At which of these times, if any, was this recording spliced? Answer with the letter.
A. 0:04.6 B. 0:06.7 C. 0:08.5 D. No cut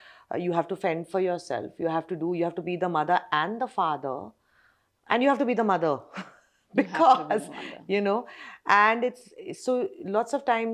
D